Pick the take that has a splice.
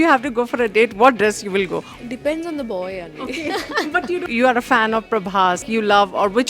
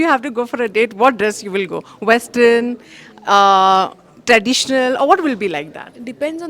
first; 3 cuts; at 1.9 s, 4.3 s, 5.6 s

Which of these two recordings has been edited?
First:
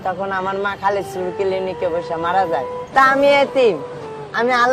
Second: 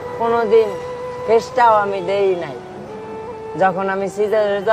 first; 1 cut; at 2.8 s

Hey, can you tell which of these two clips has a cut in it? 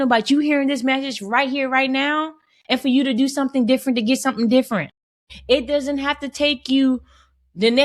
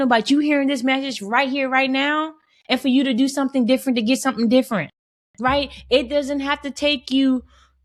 first; 1 cut; at 5.3 s

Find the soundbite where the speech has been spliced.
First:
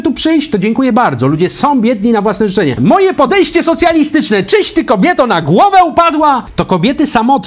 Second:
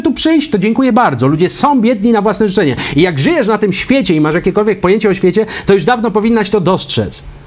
first; 2 cuts; at 2.8 s, 6.5 s

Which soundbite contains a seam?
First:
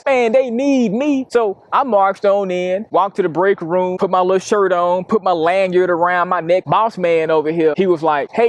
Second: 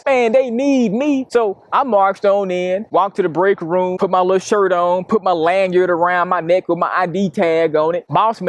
first; 1 cut; at 6.6 s

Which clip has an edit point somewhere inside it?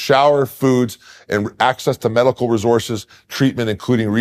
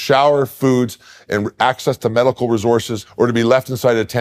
second; 1 cut; at 3.0 s

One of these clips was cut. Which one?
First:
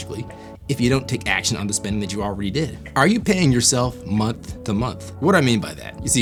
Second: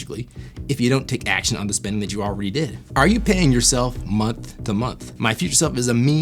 second; 1 cut; at 5.0 s

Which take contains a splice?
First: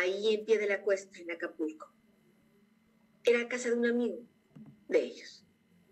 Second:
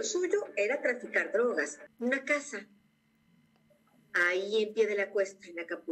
second; 1 cut; at 1.8 s

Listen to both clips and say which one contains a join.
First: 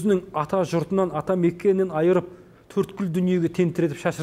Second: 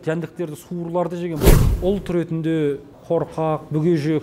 second; 2 cuts; at 1.4 s, 2.9 s

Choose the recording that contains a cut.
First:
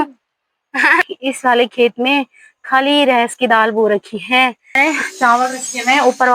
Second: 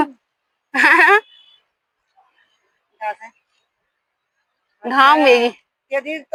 first; 2 cuts; at 1.0 s, 4.6 s

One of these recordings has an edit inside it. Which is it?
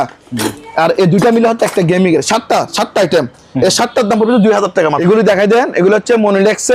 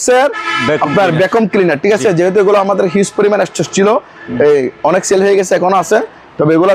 first; 1 cut; at 5.0 s

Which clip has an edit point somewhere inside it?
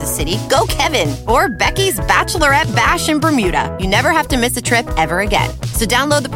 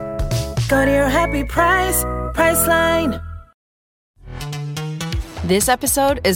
second; 1 cut; at 3.6 s

